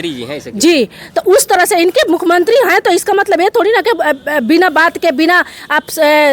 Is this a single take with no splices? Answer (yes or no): yes